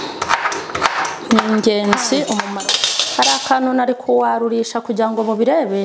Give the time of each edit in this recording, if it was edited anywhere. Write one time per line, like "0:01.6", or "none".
0:02.5